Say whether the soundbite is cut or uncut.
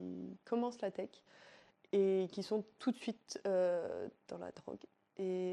uncut